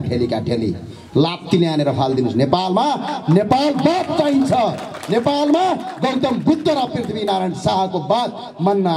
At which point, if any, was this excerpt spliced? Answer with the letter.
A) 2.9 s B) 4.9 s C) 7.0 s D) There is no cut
D